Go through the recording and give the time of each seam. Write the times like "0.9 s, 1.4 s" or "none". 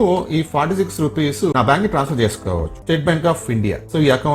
1.5 s, 2.8 s